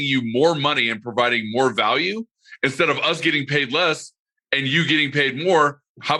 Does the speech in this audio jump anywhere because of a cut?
no; 0 cuts

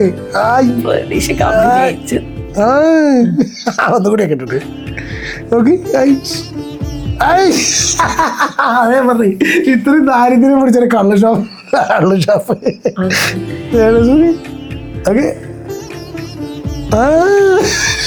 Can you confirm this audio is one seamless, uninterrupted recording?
yes; 0 cuts

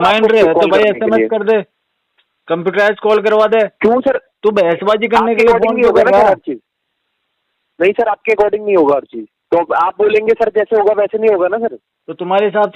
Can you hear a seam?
no; 0 cuts

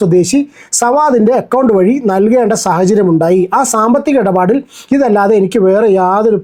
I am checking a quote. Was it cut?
no; 0 cuts

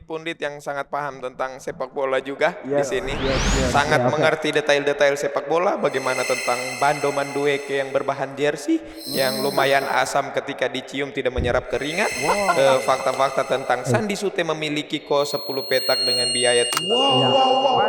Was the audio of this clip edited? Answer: no; 0 cuts

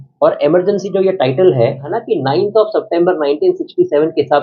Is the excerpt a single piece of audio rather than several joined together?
no; 1 cut; at 1.9 s

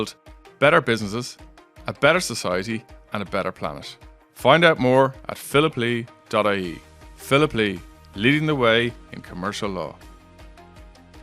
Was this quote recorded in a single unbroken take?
no; 1 cut; at 10.0 s

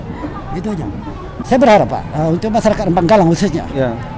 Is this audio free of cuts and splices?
no; 1 cut; at 1.3 s

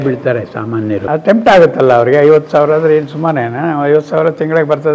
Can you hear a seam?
yes; 1 cut; at 1.0 s

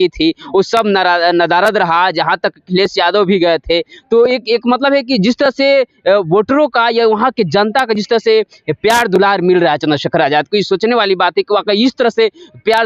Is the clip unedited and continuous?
yes; 0 cuts

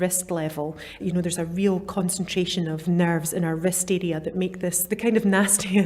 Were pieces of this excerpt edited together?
yes; 3 cuts; at 1.0 s, 2.8 s, 4.8 s

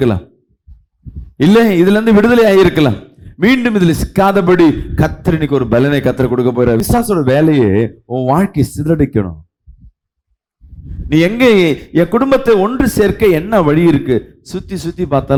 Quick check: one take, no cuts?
yes; 0 cuts

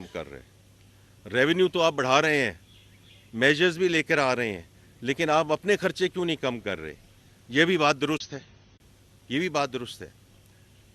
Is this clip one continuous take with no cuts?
yes; 0 cuts

